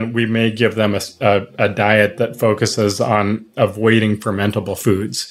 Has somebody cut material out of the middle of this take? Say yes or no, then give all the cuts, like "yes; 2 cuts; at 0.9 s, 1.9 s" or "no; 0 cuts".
no; 0 cuts